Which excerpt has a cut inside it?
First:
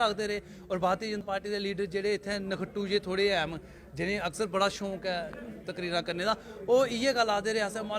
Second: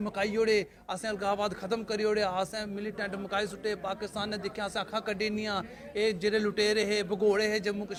first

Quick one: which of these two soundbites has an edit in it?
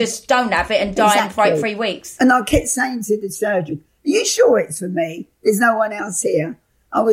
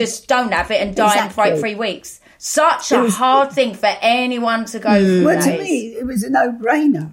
first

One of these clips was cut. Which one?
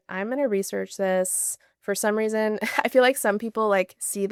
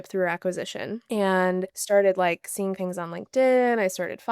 second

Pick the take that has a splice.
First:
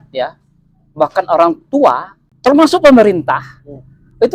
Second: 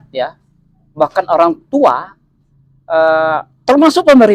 first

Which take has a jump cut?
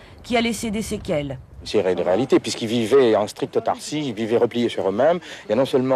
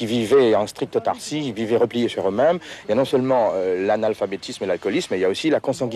first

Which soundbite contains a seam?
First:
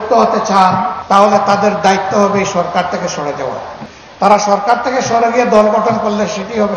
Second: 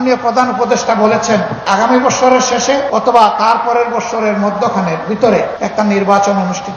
second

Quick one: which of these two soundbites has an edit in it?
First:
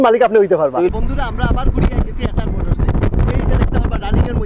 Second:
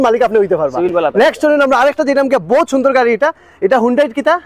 first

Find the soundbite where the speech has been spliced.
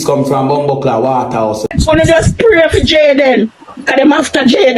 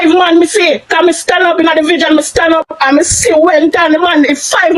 first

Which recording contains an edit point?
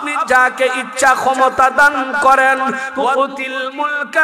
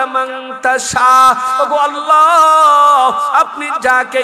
first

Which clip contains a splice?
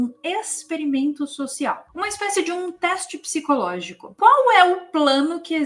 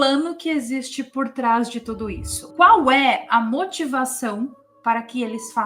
first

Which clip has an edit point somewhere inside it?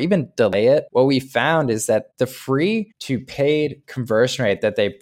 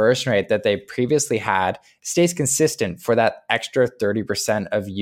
first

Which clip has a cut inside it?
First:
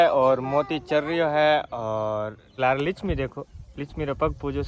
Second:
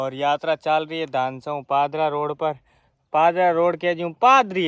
first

